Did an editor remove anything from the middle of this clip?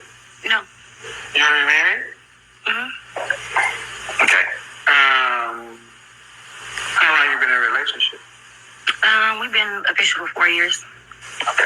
no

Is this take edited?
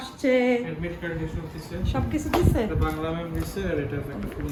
no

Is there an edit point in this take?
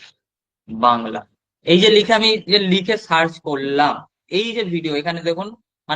yes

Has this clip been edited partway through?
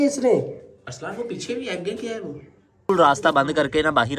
yes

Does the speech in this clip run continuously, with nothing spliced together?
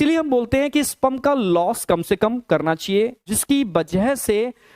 no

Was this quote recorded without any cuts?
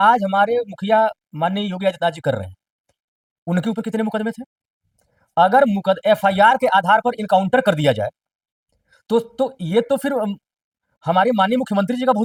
yes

